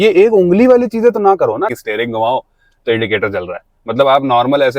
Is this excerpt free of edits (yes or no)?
no